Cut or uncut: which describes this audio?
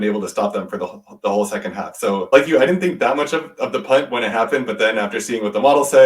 cut